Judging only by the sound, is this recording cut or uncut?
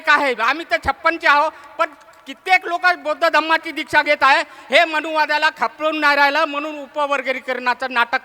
uncut